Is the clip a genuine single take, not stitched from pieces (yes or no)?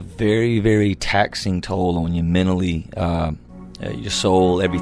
yes